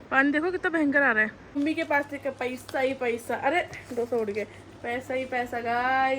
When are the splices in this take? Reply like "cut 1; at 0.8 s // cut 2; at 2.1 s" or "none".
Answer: cut 1; at 1.6 s